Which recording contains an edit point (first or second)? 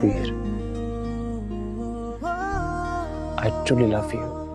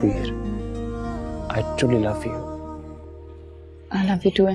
second